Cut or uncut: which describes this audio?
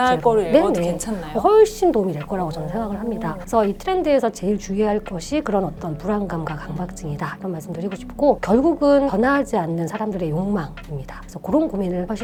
uncut